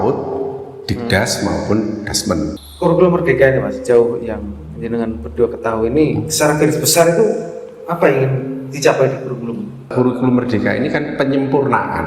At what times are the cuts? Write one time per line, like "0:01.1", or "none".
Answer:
0:02.6
0:09.9